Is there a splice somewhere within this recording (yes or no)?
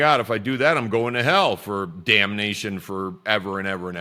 no